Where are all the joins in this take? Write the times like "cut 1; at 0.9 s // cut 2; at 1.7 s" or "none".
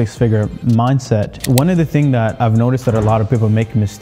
cut 1; at 1.4 s // cut 2; at 2.3 s